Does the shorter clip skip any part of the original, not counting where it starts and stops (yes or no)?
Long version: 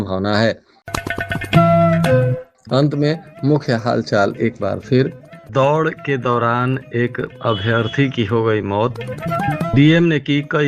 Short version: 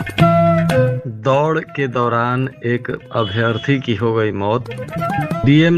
yes